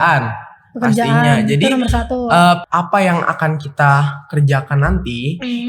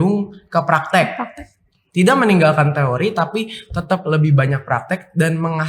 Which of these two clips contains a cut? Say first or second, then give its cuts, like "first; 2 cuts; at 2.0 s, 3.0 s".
first; 1 cut; at 2.7 s